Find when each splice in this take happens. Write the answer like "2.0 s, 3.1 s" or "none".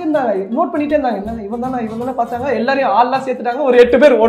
none